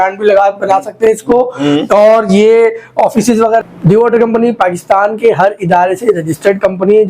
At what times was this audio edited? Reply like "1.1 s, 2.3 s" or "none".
3.7 s

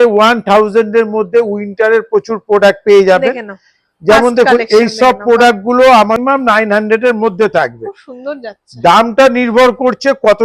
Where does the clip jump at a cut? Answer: 6.2 s

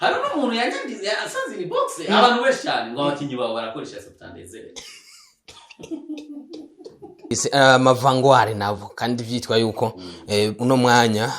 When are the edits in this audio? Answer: 7.2 s

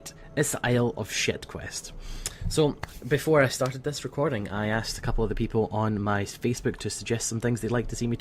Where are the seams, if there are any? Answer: 7.0 s

